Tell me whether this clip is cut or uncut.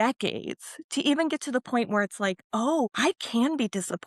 cut